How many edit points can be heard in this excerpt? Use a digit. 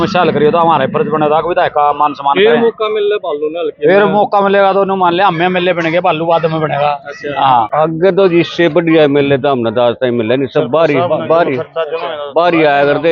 1